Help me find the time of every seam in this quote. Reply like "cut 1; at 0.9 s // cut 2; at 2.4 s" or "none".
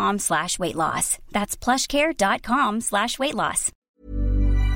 cut 1; at 3.7 s